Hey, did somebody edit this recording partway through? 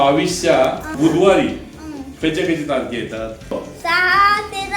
yes; 2 cuts; at 0.9 s, 3.5 s

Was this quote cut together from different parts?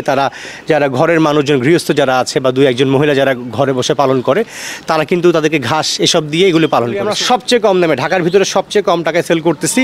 yes; 1 cut; at 7.1 s

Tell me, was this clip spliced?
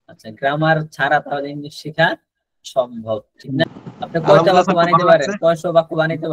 yes; 1 cut; at 3.6 s

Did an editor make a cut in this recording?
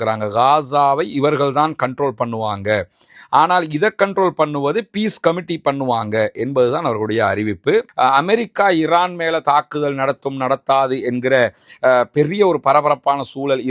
yes; 1 cut; at 7.9 s

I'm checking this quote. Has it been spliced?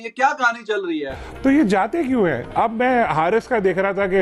yes; 1 cut; at 1.1 s

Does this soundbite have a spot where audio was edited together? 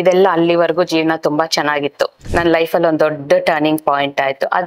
yes; 1 cut; at 2.2 s

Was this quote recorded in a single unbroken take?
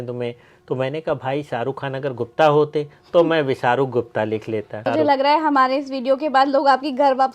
no; 1 cut; at 4.8 s

